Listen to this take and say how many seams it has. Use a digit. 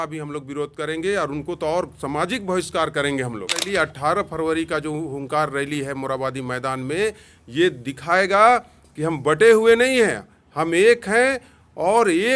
1